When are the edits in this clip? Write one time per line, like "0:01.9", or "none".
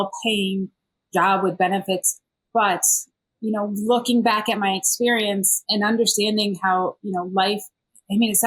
none